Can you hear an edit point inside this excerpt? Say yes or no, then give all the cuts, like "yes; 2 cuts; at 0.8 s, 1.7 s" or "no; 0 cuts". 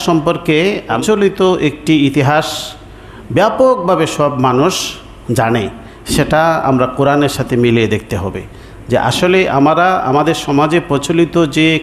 yes; 1 cut; at 1.0 s